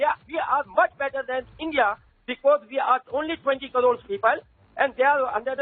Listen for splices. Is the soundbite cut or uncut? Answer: uncut